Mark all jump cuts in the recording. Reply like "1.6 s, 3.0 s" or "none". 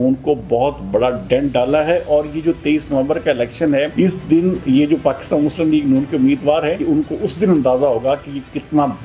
3.9 s, 6.8 s